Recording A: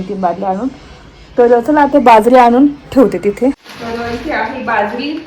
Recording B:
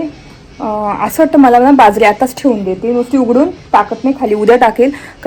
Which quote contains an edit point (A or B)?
A